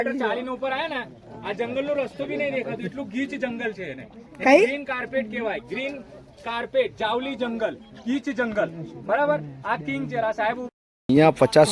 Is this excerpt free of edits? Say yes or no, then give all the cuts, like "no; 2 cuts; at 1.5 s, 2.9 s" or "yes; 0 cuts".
no; 1 cut; at 10.7 s